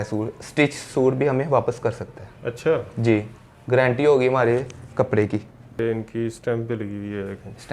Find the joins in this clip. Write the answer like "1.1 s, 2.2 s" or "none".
5.8 s

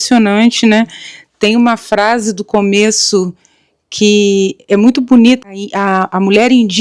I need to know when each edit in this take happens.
5.5 s

